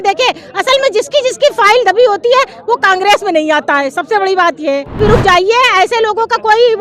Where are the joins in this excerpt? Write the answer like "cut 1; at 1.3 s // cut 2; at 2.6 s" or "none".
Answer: cut 1; at 5.0 s